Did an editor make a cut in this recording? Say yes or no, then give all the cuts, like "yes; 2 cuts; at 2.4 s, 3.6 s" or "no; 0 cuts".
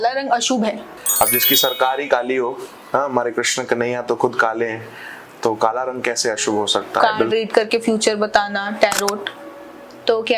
yes; 2 cuts; at 0.9 s, 7.2 s